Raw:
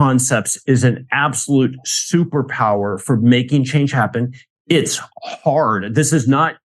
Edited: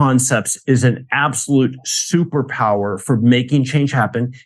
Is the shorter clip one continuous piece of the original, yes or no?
yes